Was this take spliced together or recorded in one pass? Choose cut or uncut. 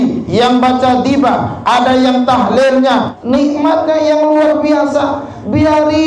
cut